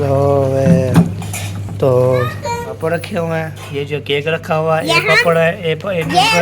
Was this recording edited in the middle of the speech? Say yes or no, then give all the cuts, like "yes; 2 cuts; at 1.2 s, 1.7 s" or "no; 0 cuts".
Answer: yes; 1 cut; at 2.7 s